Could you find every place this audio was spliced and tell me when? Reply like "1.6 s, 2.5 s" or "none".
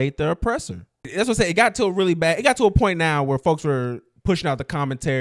1.0 s